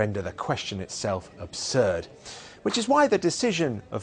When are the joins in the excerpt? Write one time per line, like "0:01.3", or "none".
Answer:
none

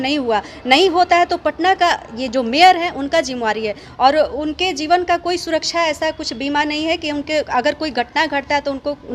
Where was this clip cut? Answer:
0:03.8

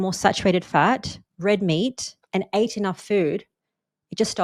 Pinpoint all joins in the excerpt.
none

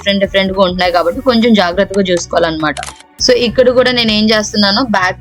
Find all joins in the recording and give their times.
0:02.8

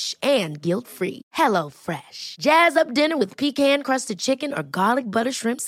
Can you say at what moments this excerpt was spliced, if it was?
none

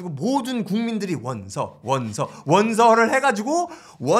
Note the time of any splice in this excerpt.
none

